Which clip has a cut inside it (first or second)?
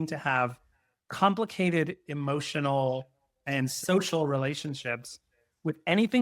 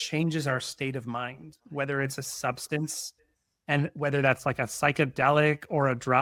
first